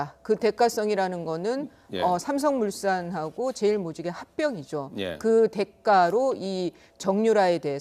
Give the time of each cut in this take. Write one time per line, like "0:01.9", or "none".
0:03.4